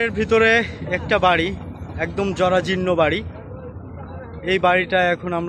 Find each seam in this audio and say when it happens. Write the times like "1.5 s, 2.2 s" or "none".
none